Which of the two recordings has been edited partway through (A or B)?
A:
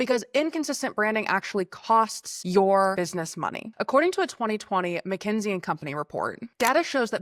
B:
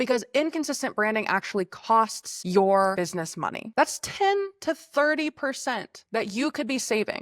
B